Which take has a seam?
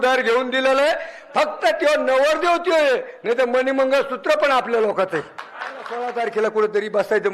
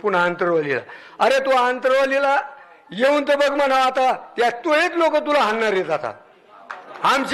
first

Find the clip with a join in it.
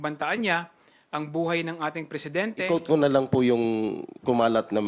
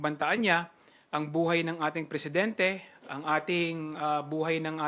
first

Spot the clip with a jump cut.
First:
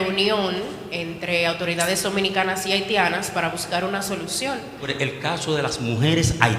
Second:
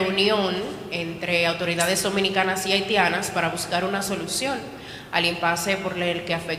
first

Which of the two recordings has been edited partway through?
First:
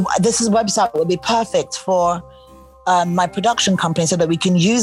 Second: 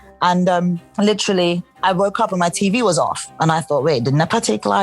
second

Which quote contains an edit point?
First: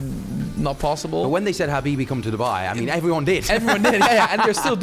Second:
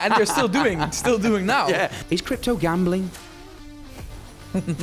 second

